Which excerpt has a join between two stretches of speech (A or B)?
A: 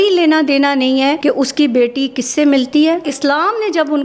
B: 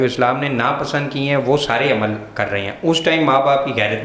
A